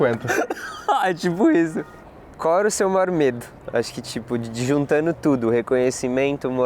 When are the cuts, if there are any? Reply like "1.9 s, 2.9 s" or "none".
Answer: 1.8 s